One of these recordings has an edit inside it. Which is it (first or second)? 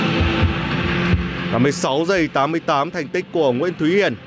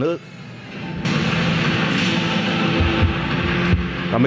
second